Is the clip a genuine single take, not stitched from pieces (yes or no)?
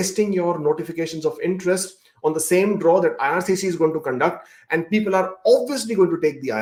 yes